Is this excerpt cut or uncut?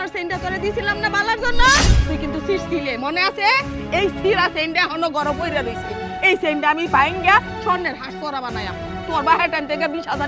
uncut